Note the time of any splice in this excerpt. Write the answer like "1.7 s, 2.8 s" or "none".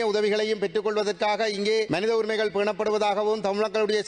1.9 s